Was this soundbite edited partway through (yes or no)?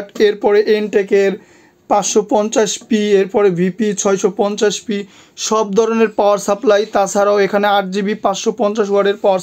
no